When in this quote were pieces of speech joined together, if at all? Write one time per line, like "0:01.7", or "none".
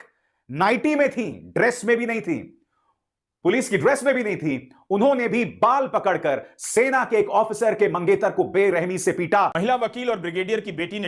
0:09.5